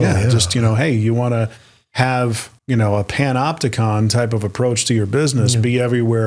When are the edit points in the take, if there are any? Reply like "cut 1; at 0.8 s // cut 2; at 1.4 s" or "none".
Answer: cut 1; at 2.5 s